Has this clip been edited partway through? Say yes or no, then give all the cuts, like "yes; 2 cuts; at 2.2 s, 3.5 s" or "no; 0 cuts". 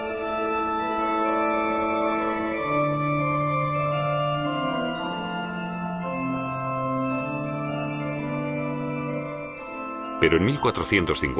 yes; 1 cut; at 8.5 s